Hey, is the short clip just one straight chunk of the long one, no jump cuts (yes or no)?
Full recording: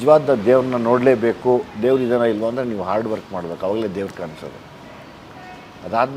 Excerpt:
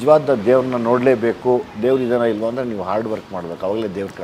yes